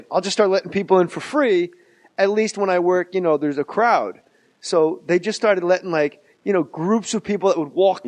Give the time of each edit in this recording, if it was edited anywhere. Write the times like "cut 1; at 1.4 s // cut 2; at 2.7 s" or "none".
cut 1; at 1.5 s